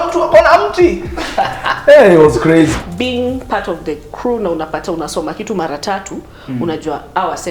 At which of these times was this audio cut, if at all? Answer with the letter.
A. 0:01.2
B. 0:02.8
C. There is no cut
B